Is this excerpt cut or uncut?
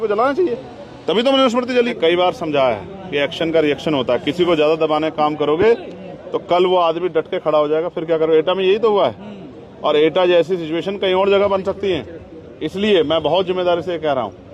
cut